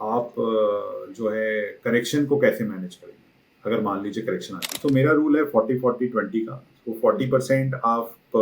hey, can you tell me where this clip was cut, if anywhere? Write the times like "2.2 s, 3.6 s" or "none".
4.8 s